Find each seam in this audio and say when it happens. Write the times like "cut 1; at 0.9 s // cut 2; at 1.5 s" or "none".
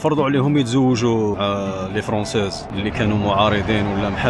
cut 1; at 1.3 s